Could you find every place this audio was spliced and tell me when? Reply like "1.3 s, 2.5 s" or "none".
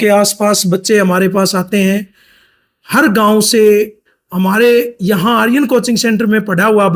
none